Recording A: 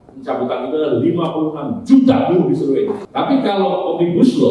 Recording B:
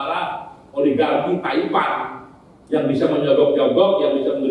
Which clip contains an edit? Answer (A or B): A